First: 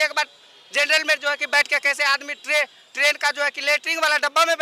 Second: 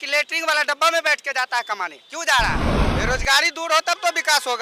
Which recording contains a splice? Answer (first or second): second